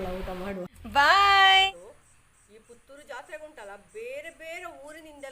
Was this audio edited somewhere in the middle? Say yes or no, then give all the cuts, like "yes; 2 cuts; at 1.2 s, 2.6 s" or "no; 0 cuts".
yes; 1 cut; at 1.7 s